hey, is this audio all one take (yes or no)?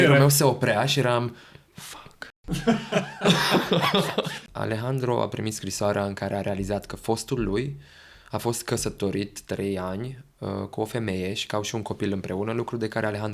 no